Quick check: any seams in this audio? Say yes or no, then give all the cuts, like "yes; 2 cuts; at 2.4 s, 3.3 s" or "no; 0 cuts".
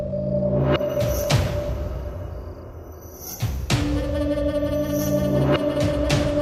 no; 0 cuts